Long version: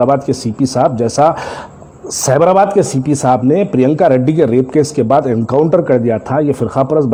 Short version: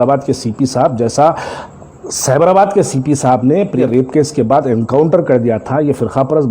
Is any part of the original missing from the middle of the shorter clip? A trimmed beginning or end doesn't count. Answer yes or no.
yes